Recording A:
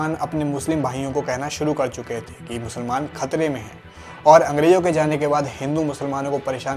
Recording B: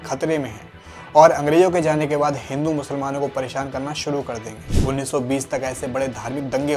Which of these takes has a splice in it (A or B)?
B